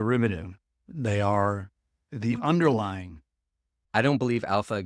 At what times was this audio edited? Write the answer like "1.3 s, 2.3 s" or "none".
3.8 s